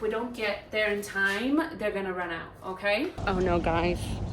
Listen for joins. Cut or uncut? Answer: cut